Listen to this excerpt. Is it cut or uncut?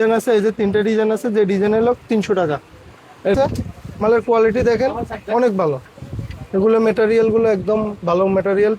cut